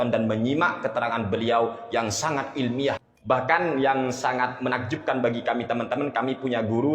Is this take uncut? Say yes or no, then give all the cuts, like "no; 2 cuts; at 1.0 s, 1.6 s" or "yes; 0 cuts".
no; 1 cut; at 3.0 s